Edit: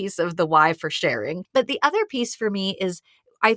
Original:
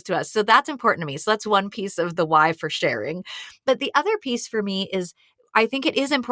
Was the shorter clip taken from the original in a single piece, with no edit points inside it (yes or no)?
no